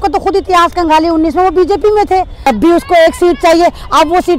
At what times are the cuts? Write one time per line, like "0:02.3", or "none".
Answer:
0:02.3